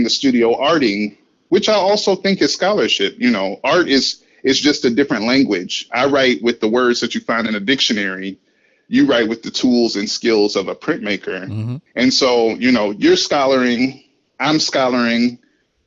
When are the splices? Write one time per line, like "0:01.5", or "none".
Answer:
none